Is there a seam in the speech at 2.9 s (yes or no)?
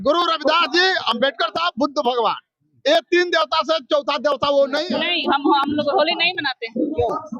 no